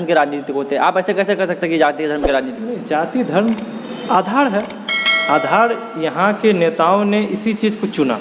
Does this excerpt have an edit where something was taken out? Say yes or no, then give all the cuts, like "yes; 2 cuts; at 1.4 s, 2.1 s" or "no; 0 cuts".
no; 0 cuts